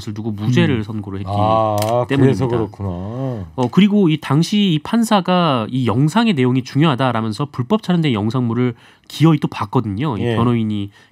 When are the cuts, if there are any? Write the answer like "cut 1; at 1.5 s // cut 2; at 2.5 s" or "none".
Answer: none